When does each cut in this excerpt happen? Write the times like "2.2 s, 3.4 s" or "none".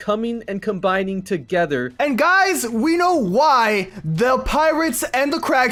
none

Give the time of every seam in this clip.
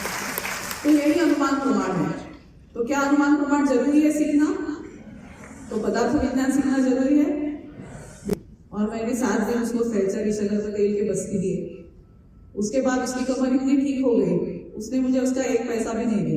8.3 s

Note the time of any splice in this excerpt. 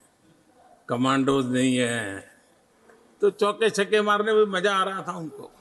none

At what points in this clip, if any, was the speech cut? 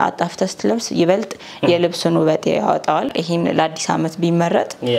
3.1 s

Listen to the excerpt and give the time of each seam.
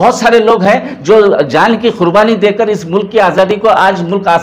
none

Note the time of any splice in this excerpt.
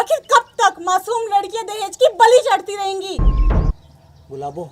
3.8 s

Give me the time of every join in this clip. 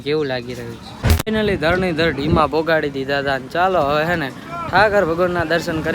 1.2 s

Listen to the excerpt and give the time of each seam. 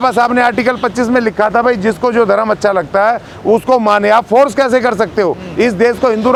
none

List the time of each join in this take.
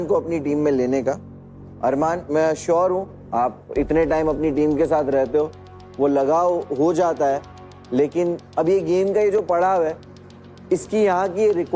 none

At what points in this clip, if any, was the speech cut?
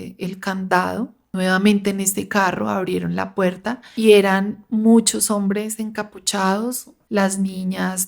1.2 s, 3.8 s, 6.9 s

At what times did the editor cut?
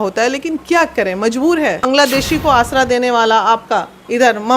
1.8 s

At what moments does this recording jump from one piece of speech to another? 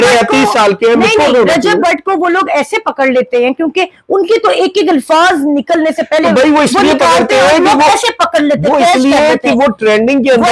none

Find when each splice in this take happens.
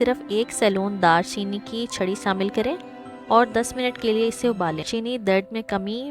4.9 s

